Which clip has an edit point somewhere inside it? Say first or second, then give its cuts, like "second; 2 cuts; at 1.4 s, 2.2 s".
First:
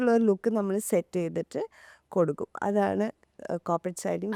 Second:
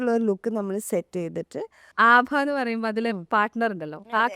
second; 1 cut; at 1.8 s